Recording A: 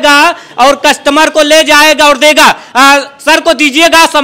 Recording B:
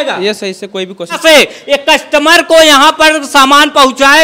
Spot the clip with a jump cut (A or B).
B